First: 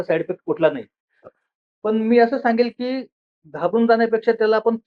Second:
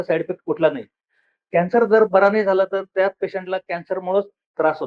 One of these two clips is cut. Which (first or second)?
first